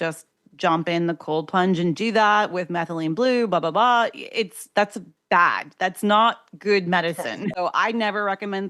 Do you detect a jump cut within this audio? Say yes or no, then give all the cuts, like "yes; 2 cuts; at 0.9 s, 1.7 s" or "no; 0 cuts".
yes; 1 cut; at 7.5 s